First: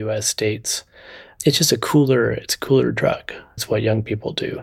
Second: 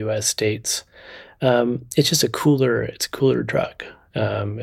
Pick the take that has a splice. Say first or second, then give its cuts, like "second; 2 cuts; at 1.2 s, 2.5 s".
first; 2 cuts; at 1.3 s, 3.5 s